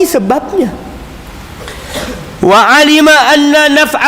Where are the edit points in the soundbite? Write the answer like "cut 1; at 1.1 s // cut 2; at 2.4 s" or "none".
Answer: cut 1; at 1.3 s

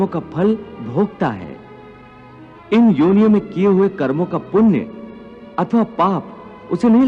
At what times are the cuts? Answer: cut 1; at 2.5 s

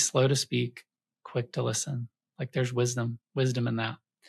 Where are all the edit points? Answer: none

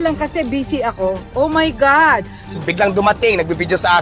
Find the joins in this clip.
cut 1; at 2.6 s

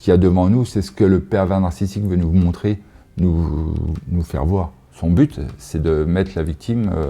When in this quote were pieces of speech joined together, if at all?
cut 1; at 4.9 s

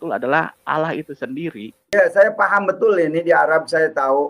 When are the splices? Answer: cut 1; at 1.9 s

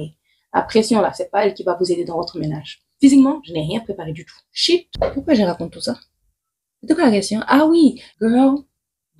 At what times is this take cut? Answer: cut 1; at 2.9 s // cut 2; at 4.9 s // cut 3; at 8.1 s

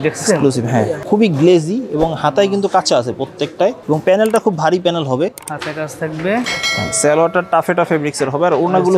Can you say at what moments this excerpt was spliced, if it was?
cut 1; at 1.0 s // cut 2; at 3.8 s

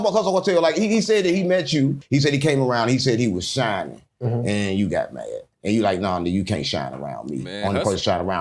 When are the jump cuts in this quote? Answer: cut 1; at 2.0 s

